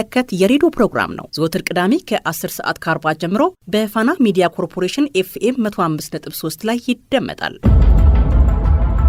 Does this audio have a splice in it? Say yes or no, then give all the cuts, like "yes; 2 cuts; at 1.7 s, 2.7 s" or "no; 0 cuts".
no; 0 cuts